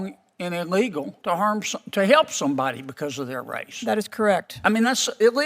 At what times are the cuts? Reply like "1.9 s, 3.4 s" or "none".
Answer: 1.1 s